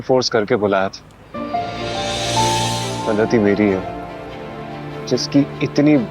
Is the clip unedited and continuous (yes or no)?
no